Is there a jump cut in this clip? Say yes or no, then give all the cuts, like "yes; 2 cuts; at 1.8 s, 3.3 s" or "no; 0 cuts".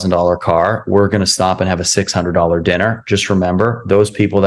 no; 0 cuts